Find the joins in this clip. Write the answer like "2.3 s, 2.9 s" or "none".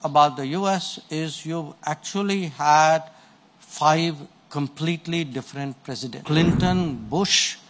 6.1 s